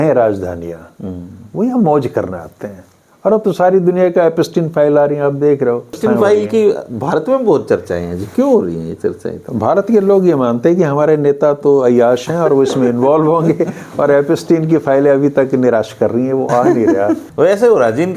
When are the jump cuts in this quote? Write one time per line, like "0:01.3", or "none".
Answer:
0:06.0
0:17.2